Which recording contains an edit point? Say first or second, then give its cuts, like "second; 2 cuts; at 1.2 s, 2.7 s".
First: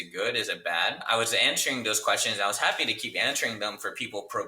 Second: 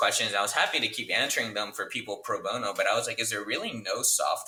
first; 1 cut; at 1.0 s